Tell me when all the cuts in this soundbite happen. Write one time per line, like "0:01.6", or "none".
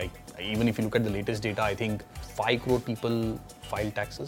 0:02.1